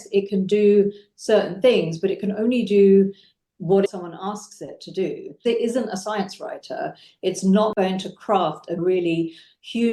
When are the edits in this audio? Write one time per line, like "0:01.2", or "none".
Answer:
0:03.9
0:05.4
0:08.8